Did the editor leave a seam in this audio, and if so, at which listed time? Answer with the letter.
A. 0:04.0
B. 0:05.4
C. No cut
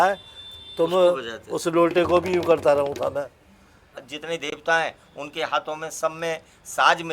A